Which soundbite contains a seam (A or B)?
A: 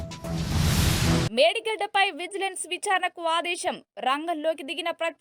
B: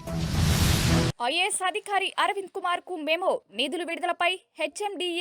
B